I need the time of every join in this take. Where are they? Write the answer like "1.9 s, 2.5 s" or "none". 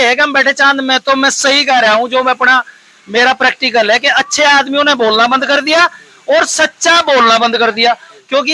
none